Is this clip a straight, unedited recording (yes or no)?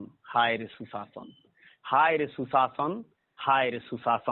yes